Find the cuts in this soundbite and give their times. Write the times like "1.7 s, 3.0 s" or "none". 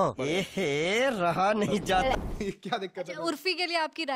2.1 s